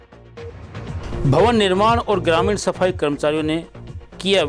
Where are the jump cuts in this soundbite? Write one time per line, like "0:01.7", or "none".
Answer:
0:01.2